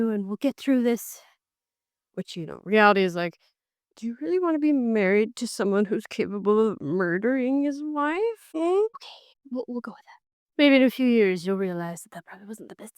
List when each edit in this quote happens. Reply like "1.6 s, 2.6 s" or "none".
8.4 s, 9.0 s